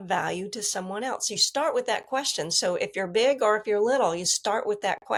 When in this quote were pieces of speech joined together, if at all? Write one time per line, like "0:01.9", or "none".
none